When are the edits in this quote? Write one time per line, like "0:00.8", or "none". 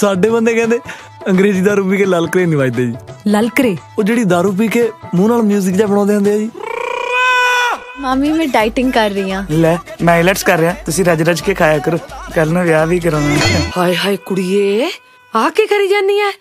0:08.1
0:13.7